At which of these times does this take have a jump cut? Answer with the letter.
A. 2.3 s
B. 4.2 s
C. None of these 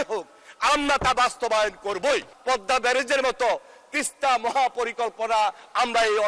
A